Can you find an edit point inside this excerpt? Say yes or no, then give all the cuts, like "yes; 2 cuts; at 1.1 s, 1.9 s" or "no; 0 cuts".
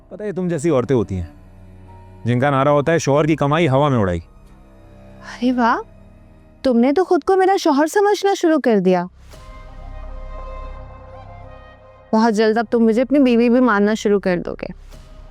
no; 0 cuts